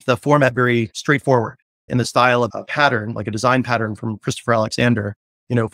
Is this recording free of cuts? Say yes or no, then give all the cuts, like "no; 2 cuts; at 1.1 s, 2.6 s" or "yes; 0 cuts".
yes; 0 cuts